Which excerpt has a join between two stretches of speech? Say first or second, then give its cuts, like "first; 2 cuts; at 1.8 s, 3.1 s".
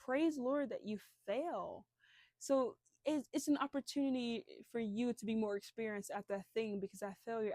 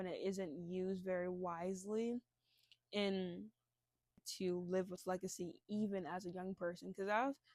second; 1 cut; at 4.3 s